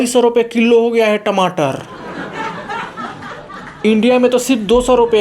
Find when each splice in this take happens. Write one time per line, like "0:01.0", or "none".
0:01.9
0:03.8